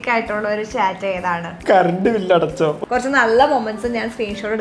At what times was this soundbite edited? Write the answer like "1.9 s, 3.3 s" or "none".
1.5 s, 2.8 s